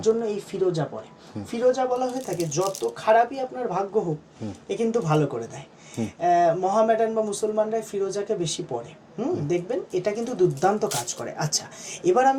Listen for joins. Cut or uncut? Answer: uncut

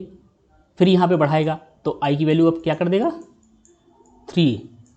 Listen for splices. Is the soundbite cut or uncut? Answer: uncut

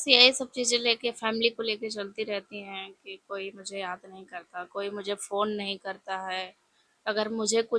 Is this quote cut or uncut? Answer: uncut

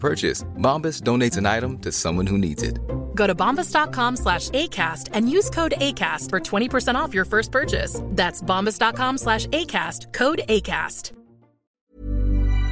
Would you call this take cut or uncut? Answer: cut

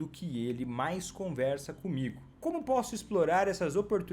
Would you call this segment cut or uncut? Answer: cut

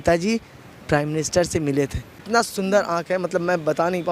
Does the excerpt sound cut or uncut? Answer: cut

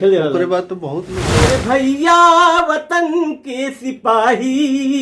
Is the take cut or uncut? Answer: cut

